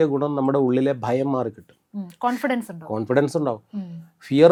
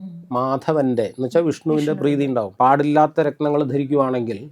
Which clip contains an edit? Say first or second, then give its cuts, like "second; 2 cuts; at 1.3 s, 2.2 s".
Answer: second; 1 cut; at 2.5 s